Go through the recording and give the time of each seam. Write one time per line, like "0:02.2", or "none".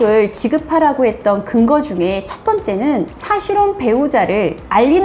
0:03.1